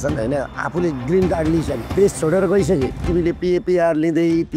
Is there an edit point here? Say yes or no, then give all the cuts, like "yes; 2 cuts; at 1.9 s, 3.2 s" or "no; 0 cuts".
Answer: yes; 2 cuts; at 1.8 s, 3.0 s